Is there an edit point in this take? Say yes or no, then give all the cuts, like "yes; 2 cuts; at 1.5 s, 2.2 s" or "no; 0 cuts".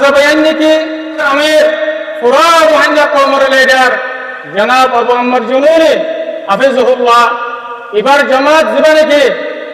yes; 1 cut; at 1.2 s